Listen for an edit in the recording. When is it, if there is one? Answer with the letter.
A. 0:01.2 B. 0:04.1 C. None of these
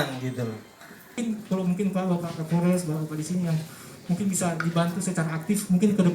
A